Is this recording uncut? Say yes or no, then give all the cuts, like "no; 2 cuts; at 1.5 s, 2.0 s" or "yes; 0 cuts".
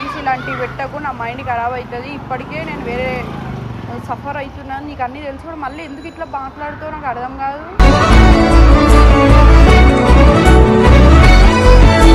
yes; 0 cuts